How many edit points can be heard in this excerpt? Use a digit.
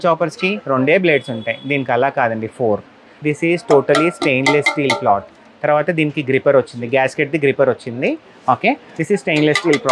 2